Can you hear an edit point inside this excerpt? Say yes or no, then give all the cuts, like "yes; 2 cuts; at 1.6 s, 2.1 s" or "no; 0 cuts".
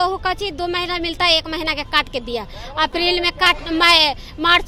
no; 0 cuts